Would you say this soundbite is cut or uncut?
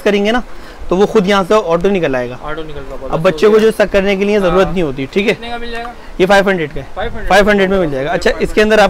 uncut